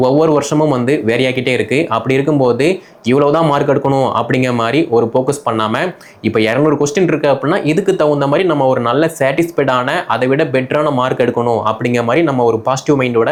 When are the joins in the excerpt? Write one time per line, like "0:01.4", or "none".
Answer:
none

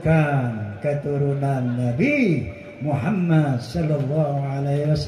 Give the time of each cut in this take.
none

